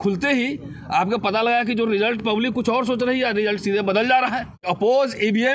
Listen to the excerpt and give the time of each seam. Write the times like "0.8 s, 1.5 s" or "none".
4.6 s

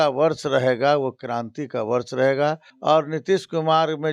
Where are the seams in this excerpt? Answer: 2.7 s

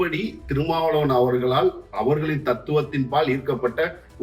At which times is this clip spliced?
none

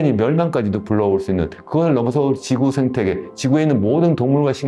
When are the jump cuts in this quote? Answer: none

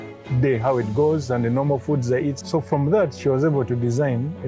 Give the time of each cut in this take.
2.4 s

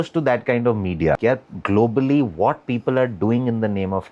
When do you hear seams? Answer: 1.2 s

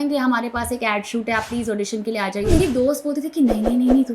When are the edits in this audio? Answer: 2.5 s

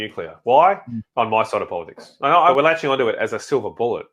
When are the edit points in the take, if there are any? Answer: 2.5 s

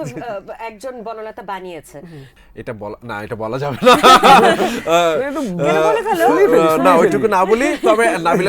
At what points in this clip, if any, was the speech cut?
2.3 s

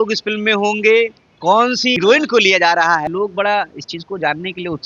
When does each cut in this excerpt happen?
2.0 s, 3.1 s

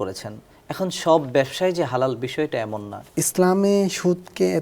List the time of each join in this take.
3.1 s

